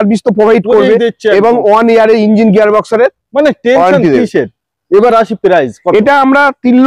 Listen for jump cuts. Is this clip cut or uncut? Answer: uncut